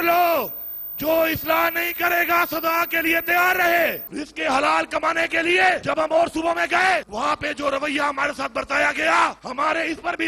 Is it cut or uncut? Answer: cut